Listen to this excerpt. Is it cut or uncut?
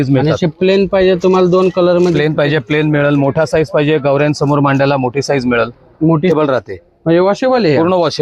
cut